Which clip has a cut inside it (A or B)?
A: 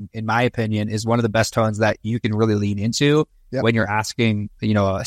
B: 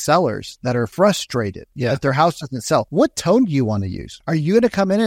B